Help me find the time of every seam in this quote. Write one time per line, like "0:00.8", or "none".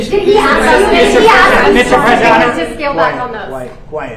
none